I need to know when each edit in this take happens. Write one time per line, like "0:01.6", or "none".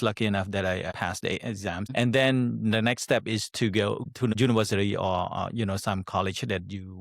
0:00.9